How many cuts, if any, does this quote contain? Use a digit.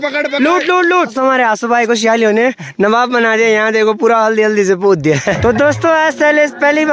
2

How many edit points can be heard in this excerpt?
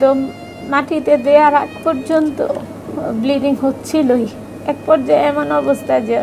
0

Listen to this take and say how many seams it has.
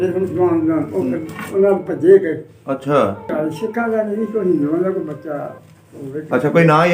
1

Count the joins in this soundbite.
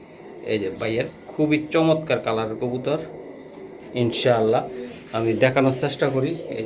0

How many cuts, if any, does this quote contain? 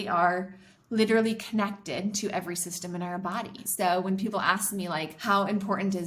2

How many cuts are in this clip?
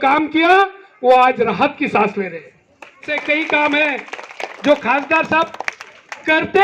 1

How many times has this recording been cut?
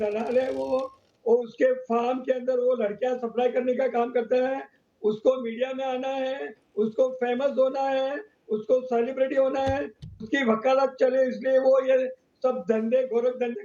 0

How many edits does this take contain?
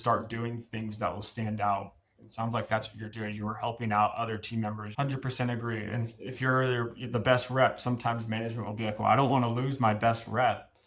1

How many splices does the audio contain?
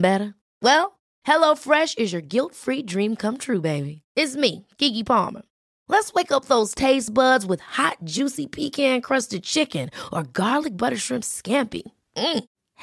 0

